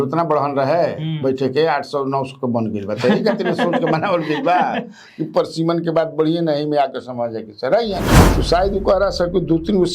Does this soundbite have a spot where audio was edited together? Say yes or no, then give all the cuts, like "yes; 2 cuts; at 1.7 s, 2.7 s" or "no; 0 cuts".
yes; 1 cut; at 8.2 s